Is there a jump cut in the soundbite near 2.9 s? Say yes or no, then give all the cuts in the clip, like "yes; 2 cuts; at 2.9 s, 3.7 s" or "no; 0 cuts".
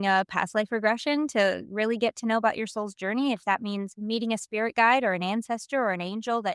no; 0 cuts